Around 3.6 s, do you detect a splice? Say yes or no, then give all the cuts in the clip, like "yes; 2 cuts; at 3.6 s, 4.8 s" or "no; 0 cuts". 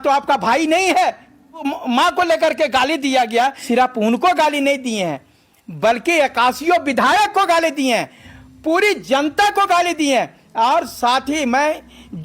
yes; 2 cuts; at 1.7 s, 3.6 s